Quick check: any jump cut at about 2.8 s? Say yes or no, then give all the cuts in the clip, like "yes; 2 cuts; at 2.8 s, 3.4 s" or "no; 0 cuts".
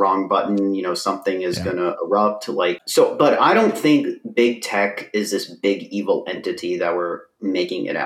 yes; 1 cut; at 2.8 s